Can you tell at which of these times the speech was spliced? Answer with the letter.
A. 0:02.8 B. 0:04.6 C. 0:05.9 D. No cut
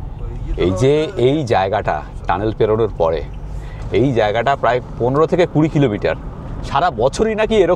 D